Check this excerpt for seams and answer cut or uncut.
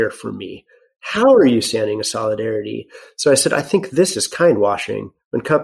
uncut